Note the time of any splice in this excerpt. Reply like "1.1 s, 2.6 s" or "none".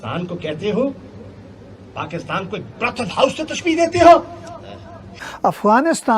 5.2 s